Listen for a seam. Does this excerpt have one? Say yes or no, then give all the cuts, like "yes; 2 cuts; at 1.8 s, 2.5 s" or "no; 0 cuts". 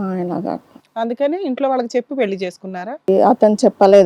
yes; 1 cut; at 3.1 s